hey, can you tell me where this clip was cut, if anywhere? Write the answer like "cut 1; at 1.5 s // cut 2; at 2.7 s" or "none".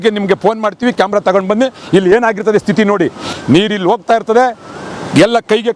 none